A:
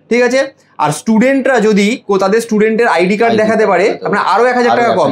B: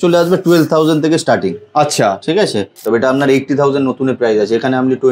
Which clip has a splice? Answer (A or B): B